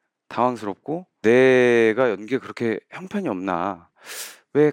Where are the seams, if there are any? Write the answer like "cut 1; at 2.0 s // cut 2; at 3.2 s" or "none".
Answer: cut 1; at 1.2 s